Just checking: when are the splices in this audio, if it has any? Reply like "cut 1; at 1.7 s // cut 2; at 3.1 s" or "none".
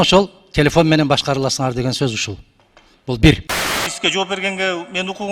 cut 1; at 3.9 s